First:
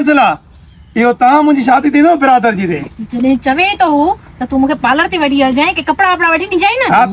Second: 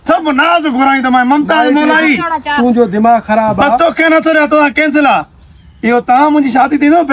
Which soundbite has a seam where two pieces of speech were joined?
second; 1 cut; at 3.8 s

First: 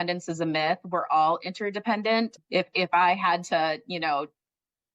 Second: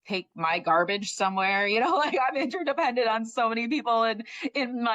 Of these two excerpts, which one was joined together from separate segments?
first; 1 cut; at 2.4 s

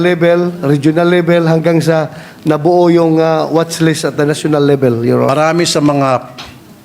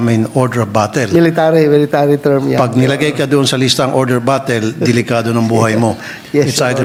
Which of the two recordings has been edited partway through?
first; 1 cut; at 5.3 s

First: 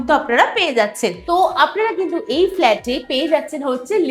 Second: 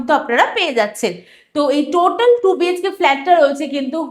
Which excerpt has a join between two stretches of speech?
first; 1 cut; at 1.2 s

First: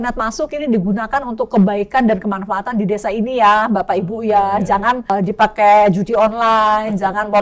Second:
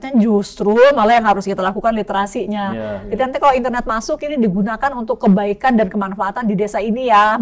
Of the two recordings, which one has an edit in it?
first; 1 cut; at 5.1 s

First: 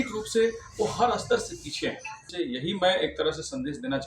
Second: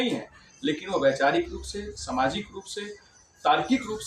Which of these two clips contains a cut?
first; 1 cut; at 2.3 s

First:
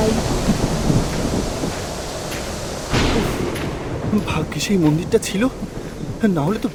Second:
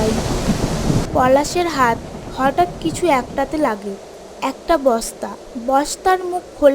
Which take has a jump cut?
second; 1 cut; at 1.1 s

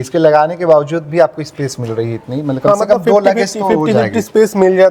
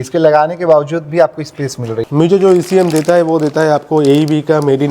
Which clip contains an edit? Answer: second; 1 cut; at 2.0 s

